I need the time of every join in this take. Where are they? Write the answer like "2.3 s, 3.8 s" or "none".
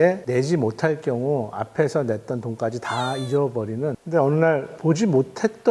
3.9 s, 4.8 s

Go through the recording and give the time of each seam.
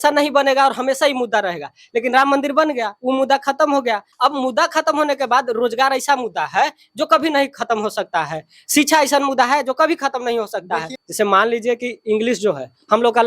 4.1 s, 11.0 s

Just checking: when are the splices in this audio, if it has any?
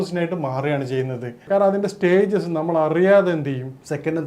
1.4 s

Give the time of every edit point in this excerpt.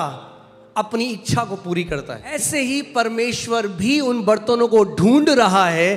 2.3 s

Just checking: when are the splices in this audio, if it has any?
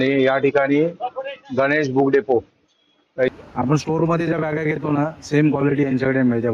3.3 s

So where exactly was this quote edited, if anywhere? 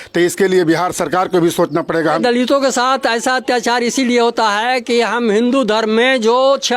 2.2 s

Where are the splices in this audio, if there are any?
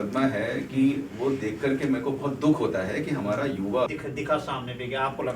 3.9 s

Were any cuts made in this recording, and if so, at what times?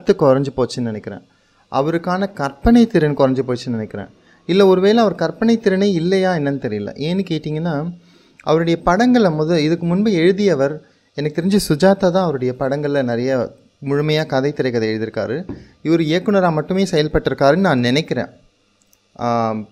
none

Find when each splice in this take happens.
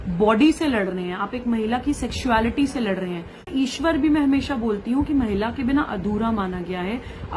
3.5 s

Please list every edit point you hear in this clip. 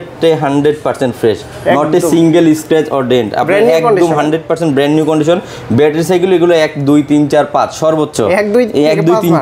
none

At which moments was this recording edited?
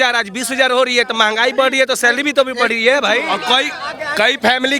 3.3 s

